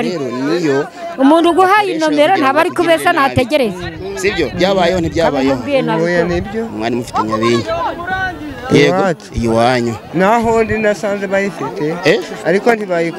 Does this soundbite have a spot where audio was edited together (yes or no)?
no